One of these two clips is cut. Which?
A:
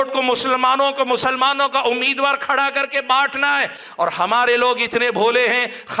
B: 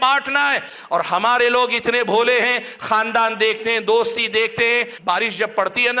B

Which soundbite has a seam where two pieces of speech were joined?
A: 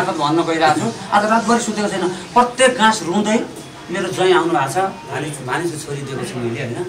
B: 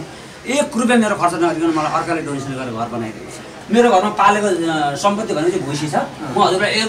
B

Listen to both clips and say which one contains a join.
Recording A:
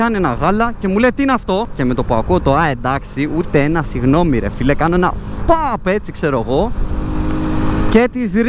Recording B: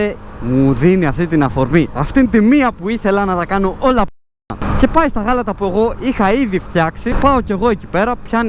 A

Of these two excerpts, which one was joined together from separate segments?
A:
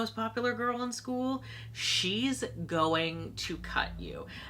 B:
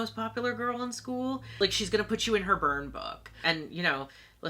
B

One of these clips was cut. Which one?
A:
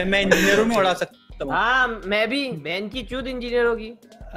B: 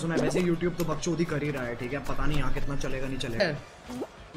B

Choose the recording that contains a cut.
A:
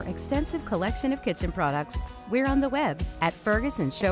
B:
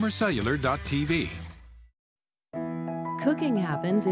B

